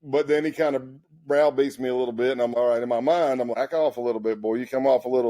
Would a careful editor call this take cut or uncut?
cut